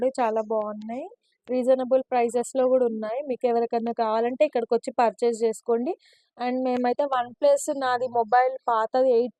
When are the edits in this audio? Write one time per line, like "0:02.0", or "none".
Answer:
none